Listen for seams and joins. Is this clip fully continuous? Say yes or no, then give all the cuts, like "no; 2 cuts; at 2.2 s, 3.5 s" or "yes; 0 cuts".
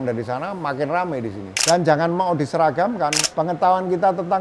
no; 2 cuts; at 1.4 s, 3.2 s